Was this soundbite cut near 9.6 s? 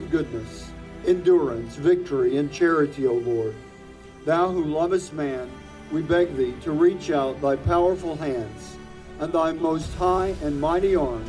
yes; 1 cut; at 9.6 s

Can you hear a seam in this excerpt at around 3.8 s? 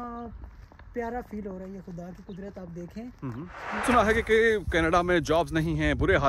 yes; 1 cut; at 3.8 s

